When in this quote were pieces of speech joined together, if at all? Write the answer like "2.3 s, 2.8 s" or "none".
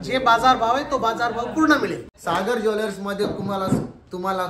2.1 s